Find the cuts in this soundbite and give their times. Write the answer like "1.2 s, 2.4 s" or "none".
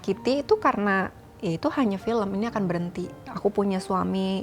3.2 s